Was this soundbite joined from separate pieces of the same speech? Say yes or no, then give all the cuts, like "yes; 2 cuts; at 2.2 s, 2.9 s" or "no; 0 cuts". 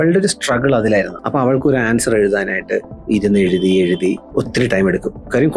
yes; 3 cuts; at 1.2 s, 2.9 s, 4.2 s